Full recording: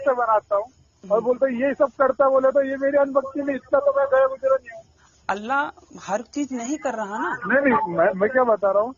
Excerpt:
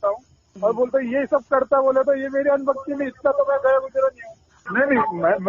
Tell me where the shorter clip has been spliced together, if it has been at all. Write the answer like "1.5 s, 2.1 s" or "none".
4.6 s